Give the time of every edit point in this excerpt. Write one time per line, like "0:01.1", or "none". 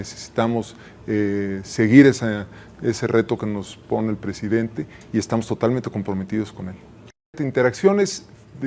0:07.2